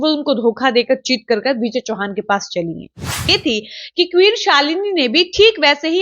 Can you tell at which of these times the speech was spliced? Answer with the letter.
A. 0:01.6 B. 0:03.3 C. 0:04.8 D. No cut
B